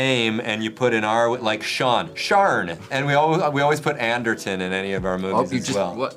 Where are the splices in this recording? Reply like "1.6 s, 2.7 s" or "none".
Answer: 2.8 s